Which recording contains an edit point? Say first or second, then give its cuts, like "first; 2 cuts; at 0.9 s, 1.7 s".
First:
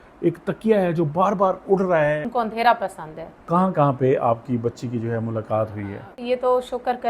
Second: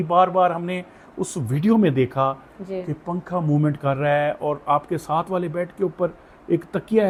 first; 3 cuts; at 2.3 s, 3.3 s, 6.2 s